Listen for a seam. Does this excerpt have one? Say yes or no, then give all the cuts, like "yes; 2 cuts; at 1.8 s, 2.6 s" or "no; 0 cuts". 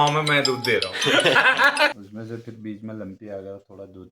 yes; 1 cut; at 2.0 s